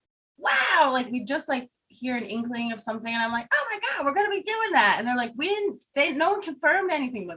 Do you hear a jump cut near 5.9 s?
no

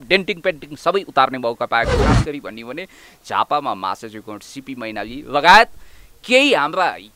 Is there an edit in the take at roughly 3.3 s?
no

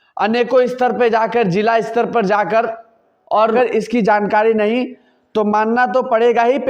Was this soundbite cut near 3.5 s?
yes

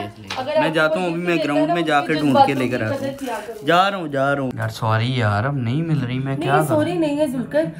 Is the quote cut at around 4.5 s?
yes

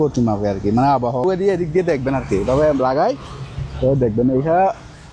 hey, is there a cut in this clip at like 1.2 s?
yes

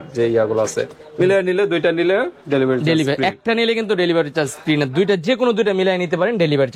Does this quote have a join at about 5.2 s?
no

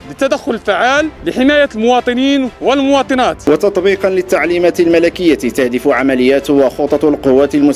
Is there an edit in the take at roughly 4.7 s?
no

